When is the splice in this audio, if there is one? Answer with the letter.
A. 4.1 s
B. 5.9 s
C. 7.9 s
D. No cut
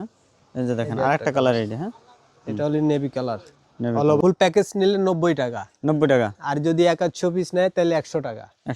A